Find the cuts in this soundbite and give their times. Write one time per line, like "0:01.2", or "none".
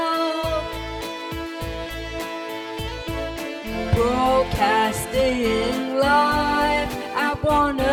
none